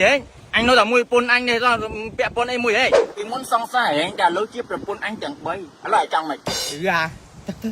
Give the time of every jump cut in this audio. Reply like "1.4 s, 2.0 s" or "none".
3.0 s